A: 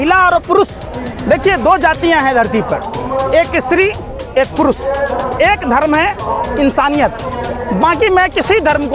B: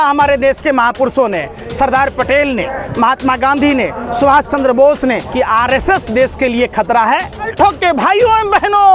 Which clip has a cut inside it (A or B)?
B